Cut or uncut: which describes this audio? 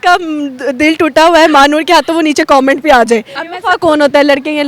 cut